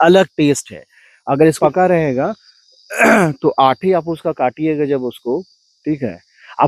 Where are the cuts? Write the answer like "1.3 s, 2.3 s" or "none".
1.6 s